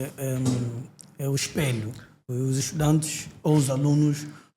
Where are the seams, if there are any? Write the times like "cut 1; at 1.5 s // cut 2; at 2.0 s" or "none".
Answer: none